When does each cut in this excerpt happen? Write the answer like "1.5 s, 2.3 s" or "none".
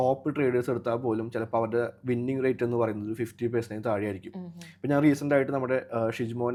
none